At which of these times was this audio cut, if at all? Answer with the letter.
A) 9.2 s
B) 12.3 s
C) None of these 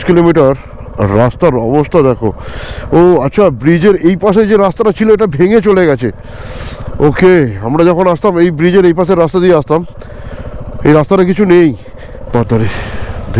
B